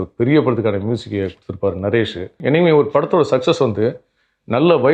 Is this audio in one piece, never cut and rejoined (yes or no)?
no